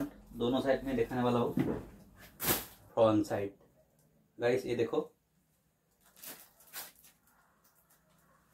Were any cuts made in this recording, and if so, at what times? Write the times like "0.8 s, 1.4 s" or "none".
2.7 s